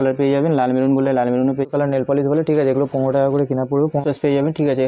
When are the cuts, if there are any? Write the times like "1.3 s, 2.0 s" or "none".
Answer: 1.6 s, 4.0 s